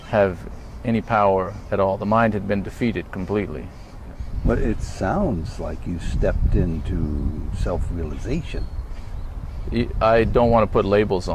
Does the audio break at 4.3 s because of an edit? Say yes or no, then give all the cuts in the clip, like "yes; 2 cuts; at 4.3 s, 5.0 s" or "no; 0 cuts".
yes; 1 cut; at 4.3 s